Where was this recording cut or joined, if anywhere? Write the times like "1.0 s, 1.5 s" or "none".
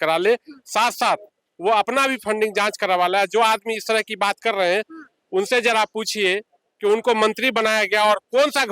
none